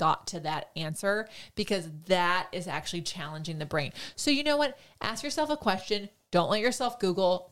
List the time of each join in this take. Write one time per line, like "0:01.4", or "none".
none